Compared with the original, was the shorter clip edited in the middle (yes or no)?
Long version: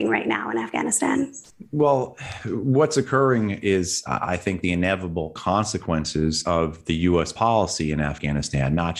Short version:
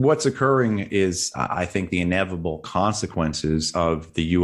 no